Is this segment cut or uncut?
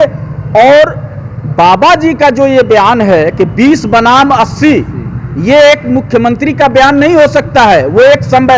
uncut